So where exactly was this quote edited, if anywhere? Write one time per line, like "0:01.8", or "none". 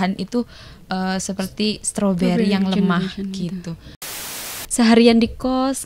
0:04.3